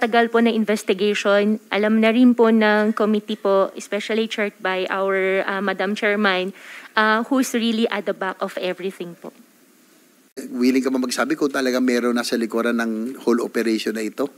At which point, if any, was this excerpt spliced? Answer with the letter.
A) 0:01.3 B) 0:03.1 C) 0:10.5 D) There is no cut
C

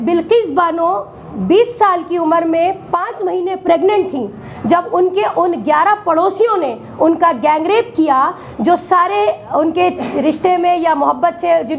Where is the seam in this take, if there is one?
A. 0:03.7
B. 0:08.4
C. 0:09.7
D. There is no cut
D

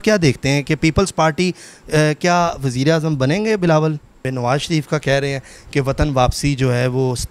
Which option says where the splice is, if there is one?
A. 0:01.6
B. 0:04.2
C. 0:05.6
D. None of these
B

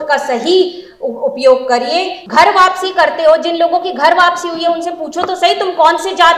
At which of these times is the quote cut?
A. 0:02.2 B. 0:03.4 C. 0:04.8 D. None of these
A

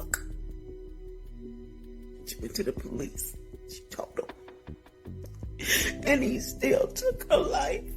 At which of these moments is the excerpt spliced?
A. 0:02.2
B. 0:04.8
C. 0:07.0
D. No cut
D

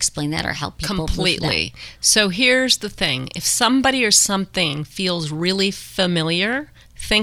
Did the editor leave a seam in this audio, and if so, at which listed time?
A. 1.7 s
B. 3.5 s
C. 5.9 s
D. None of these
D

